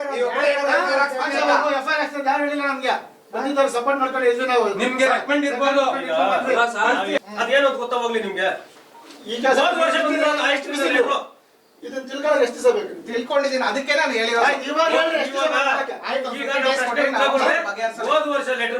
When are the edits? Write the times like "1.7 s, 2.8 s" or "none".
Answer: 7.2 s